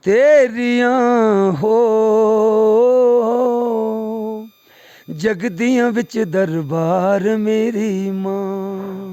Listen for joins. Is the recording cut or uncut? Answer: uncut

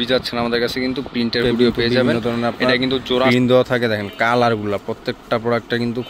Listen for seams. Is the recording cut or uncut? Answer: cut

